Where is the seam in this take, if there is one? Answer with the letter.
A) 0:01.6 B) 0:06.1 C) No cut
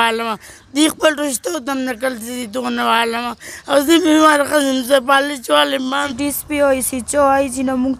B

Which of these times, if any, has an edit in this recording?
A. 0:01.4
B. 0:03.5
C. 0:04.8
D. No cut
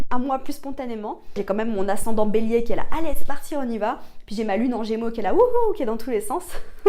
A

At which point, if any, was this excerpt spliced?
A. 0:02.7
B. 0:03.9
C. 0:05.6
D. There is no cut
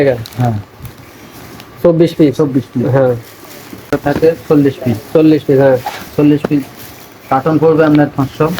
B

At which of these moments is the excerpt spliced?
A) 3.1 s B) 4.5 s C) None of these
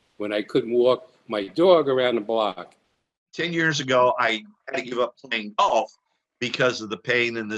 A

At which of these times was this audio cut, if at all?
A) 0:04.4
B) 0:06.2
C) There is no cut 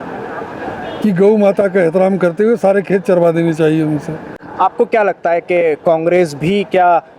C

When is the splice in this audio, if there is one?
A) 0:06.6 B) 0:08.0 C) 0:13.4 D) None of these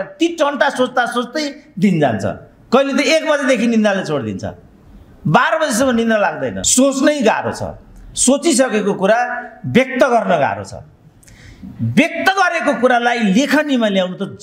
A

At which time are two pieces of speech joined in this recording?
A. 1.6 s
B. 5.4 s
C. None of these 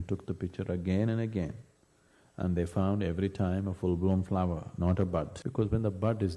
B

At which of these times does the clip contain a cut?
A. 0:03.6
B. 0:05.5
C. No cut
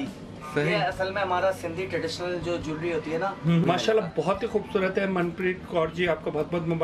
A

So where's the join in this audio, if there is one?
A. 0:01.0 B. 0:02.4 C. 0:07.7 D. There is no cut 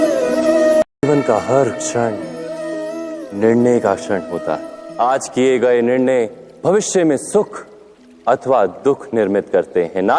A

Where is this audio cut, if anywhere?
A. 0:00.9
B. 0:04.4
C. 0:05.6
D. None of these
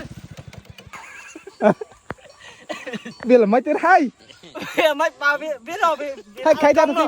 A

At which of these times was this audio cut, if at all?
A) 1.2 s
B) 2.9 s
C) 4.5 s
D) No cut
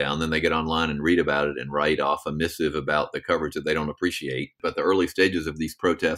C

